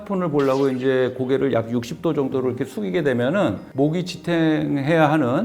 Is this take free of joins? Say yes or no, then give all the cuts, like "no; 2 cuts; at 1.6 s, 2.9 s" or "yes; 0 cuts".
no; 1 cut; at 3.6 s